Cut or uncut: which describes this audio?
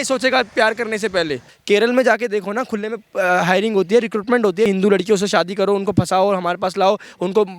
cut